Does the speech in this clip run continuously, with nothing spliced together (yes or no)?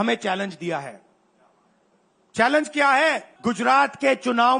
no